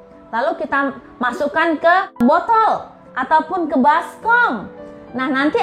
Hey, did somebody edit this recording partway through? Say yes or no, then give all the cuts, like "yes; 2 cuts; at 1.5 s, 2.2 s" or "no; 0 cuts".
yes; 1 cut; at 2.2 s